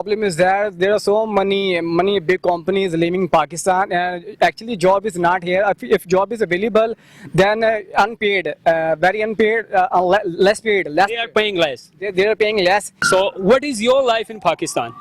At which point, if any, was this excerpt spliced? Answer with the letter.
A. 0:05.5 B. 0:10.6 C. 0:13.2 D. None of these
C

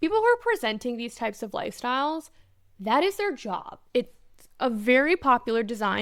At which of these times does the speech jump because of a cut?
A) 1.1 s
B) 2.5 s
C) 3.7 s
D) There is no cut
C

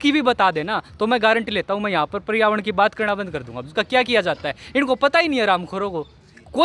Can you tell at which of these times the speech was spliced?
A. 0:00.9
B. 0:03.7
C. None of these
B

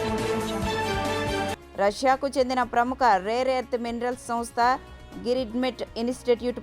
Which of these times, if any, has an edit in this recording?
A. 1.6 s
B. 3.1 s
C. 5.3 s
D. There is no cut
A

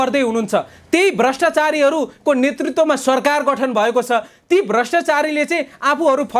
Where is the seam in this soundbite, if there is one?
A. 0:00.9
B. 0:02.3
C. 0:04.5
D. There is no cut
D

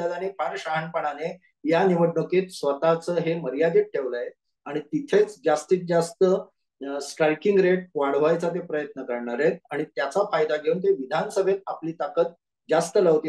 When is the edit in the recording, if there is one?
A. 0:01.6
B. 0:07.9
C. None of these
C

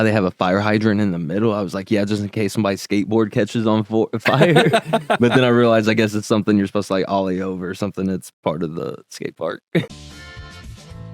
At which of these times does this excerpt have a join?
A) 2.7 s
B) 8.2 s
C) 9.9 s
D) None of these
C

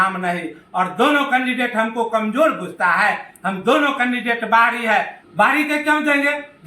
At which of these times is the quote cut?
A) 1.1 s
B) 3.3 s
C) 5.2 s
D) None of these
C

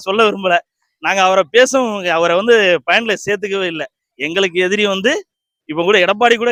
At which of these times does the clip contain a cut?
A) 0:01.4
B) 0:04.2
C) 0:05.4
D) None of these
D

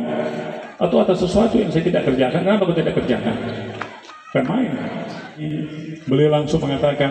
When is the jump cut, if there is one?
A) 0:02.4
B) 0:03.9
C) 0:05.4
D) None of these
C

